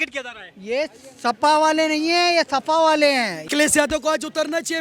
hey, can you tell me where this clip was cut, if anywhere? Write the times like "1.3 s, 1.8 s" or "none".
3.4 s